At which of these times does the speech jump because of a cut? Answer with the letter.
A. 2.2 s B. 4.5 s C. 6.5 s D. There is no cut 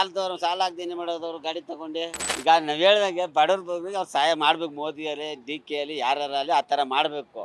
A